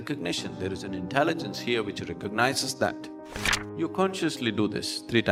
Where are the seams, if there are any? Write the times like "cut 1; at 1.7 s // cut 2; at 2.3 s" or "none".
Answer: none